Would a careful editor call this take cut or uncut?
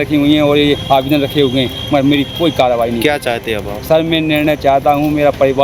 uncut